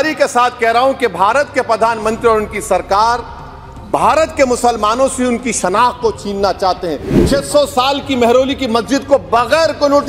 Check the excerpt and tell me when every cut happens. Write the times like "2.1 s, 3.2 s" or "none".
7.1 s